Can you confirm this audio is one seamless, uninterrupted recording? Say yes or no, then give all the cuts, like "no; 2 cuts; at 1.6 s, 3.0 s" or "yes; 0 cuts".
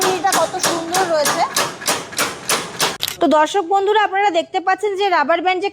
no; 1 cut; at 3.0 s